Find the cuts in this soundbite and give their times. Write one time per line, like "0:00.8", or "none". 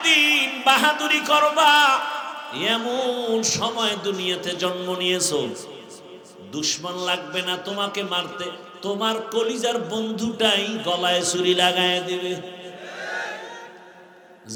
none